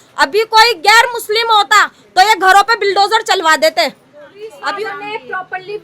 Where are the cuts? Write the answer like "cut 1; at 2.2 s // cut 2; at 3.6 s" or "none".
cut 1; at 4.6 s